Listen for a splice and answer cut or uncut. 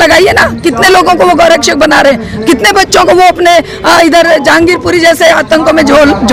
uncut